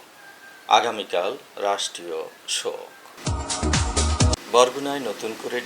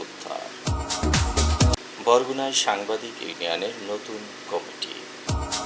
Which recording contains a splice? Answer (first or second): first